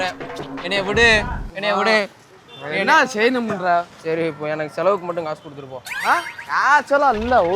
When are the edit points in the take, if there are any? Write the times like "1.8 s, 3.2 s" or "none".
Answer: 6.4 s